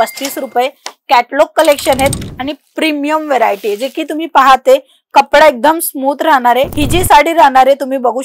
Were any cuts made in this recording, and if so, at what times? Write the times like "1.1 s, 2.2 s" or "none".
6.7 s